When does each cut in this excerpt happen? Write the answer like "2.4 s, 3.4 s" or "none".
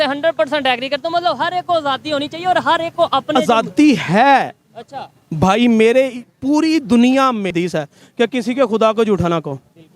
7.5 s